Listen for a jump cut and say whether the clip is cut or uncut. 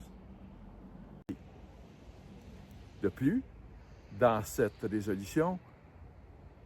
cut